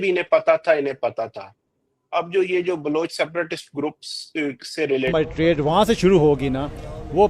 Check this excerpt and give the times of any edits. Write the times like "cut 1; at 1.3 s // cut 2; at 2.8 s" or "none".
cut 1; at 5.1 s